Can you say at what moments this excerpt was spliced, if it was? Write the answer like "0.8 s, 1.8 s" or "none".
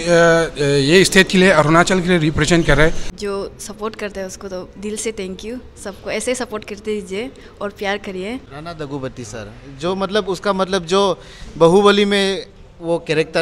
3.1 s, 8.5 s